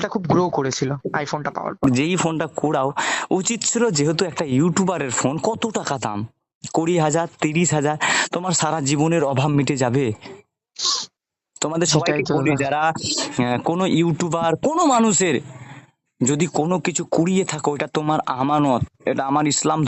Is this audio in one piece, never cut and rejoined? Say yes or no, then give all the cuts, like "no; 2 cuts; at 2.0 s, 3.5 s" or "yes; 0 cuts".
no; 1 cut; at 1.8 s